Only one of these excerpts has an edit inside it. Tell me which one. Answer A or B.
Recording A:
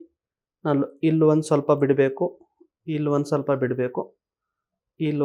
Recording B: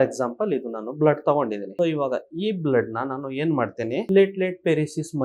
B